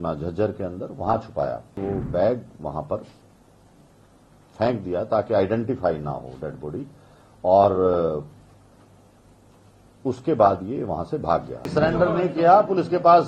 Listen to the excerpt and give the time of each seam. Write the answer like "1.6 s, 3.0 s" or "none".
1.7 s, 11.7 s

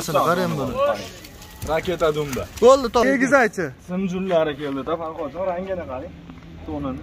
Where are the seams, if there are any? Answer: 3.0 s

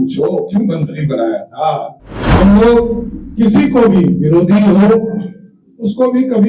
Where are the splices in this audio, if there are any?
2.2 s

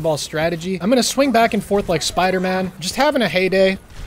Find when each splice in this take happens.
none

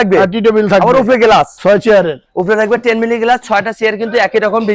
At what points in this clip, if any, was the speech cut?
1.5 s

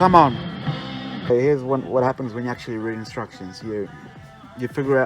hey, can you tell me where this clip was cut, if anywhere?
1.3 s

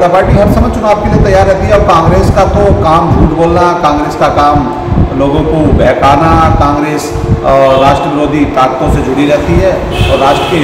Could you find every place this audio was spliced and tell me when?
none

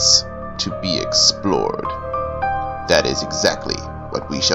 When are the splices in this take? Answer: 2.6 s

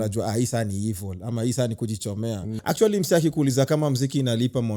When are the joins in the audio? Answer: 2.5 s

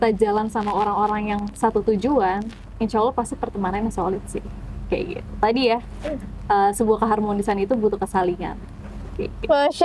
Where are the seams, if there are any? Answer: none

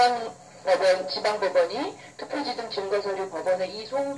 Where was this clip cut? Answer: 1.3 s

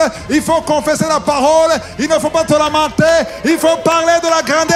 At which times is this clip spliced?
none

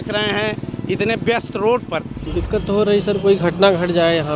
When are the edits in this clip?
2.2 s

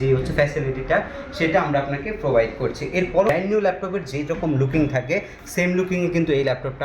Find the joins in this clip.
3.3 s

